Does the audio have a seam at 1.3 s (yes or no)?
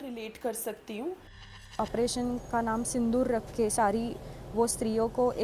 yes